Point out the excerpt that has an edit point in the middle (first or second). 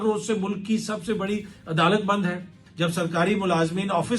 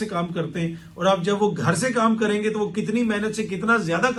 first